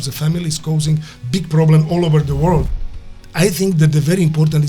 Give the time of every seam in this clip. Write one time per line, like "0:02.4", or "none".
0:03.0